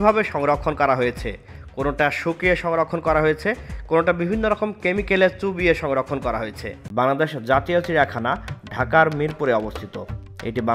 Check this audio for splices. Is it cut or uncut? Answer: cut